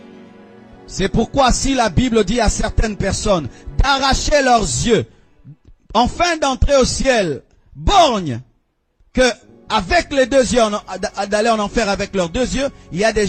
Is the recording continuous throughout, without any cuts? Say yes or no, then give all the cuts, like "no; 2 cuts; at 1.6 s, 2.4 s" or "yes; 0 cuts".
yes; 0 cuts